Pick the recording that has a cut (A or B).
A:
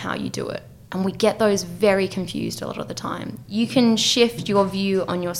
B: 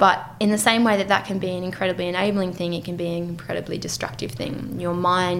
A